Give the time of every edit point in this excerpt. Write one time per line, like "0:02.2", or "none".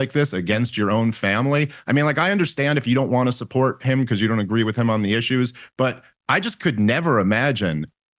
none

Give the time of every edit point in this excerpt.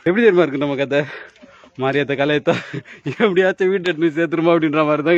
none

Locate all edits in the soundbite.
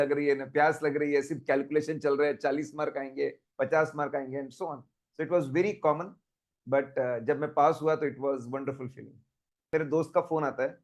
0:09.6

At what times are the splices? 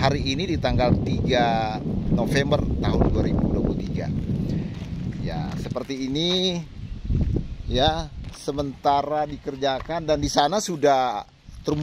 none

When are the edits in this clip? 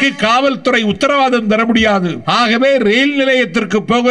0:02.2

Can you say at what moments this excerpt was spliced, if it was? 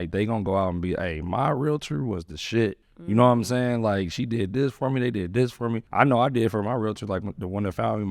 0:02.9
0:05.8

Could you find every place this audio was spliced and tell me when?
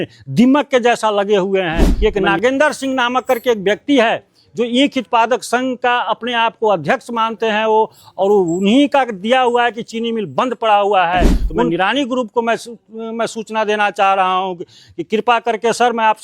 0:02.0
0:11.7

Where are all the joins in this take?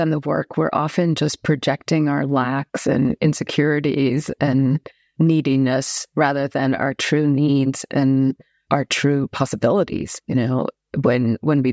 none

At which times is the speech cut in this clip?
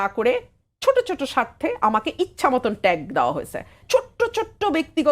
0:03.8

